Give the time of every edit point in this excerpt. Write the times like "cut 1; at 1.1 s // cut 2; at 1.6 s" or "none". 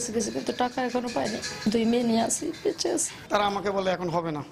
cut 1; at 3.1 s